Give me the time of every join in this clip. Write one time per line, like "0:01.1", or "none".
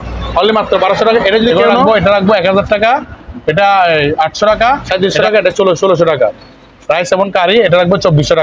0:01.7
0:04.8